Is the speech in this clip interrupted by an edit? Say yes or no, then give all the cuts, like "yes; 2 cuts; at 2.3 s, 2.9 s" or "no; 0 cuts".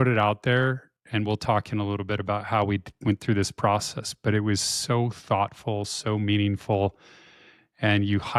no; 0 cuts